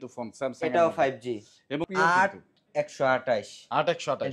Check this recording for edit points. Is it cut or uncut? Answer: cut